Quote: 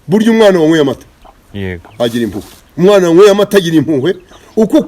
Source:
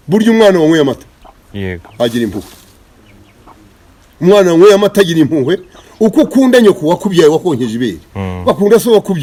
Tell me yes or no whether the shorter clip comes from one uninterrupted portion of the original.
no